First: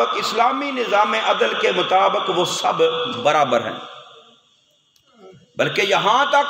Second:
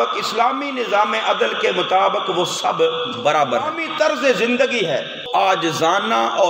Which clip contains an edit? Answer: second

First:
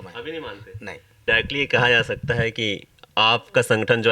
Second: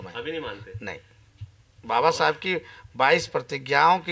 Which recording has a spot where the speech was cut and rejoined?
first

